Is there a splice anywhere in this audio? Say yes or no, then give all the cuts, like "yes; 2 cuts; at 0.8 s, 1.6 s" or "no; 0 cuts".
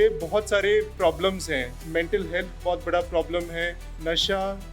yes; 1 cut; at 1.7 s